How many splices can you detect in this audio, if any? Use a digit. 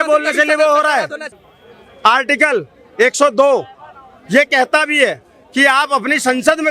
1